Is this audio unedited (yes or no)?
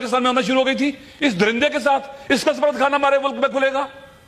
yes